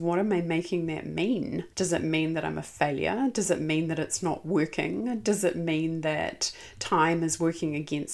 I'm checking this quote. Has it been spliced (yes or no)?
yes